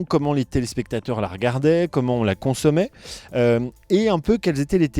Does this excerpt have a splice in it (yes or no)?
no